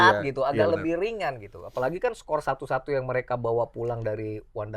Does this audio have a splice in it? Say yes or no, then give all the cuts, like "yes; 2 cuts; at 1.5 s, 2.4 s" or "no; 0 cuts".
no; 0 cuts